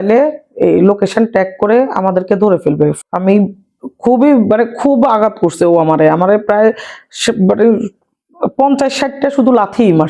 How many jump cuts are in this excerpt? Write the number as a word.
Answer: one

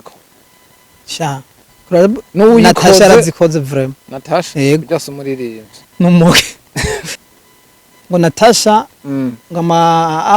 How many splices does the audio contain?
one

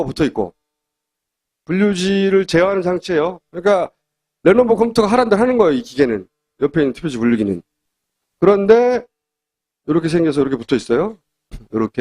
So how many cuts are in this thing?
one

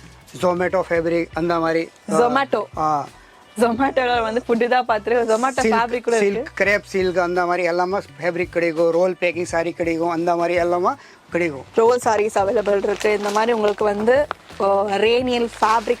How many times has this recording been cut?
one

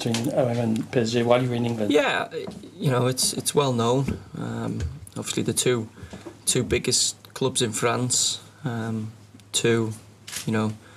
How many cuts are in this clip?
one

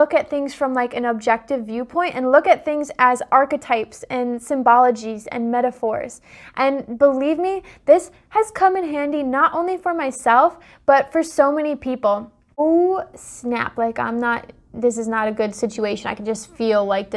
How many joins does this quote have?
one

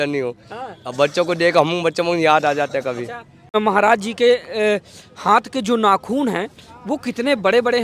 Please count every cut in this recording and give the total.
one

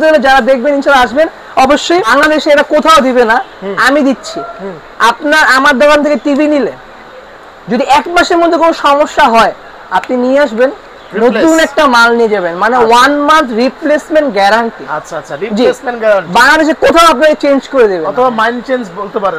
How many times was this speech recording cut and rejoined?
one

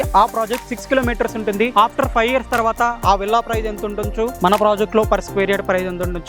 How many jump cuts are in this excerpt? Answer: zero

